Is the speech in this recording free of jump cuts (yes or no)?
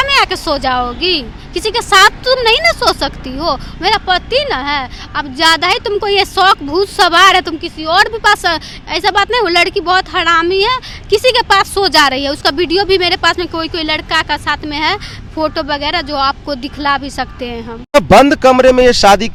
yes